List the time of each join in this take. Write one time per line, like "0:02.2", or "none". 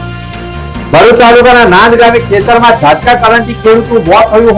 none